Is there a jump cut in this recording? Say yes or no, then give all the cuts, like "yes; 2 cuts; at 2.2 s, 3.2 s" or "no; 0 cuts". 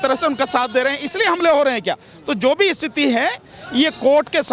no; 0 cuts